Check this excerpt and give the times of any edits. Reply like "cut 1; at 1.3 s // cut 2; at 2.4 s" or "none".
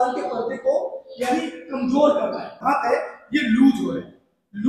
cut 1; at 2.6 s